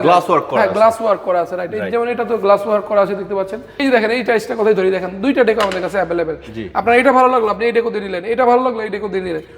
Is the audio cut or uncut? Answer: cut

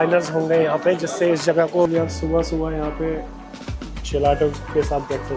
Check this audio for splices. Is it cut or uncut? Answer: cut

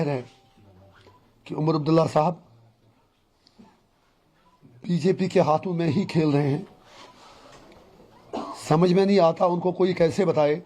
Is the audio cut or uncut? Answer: uncut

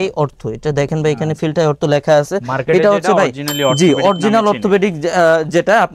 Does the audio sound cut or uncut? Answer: uncut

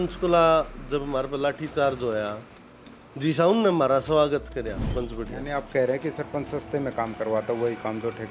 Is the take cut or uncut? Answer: cut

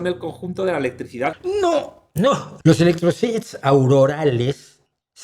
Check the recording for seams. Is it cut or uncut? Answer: cut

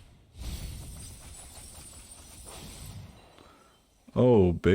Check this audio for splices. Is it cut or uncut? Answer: uncut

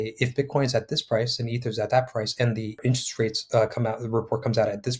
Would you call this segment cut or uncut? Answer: cut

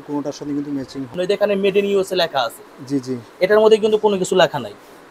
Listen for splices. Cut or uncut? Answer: cut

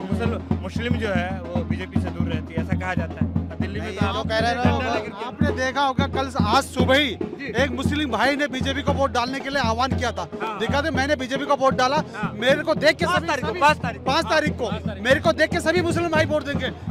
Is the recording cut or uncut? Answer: uncut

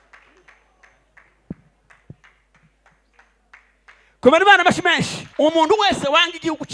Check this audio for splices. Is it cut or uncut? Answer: cut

